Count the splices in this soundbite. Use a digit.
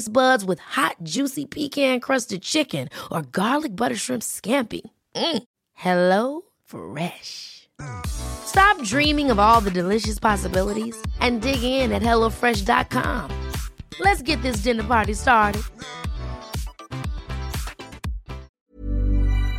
1